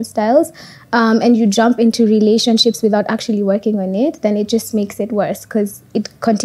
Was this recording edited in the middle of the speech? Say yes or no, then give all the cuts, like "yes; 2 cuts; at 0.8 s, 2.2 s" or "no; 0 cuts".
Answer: no; 0 cuts